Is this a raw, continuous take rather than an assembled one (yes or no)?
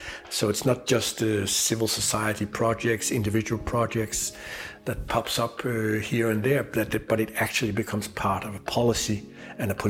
yes